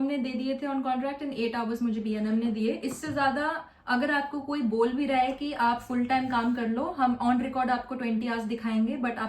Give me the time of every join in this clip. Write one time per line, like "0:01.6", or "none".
none